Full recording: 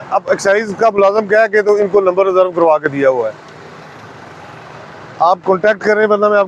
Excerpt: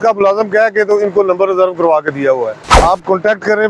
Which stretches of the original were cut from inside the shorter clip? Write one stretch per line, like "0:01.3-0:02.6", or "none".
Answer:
0:03.4-0:05.0